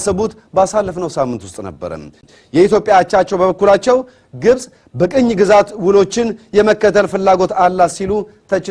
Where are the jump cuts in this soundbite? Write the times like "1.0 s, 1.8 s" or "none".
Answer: 2.2 s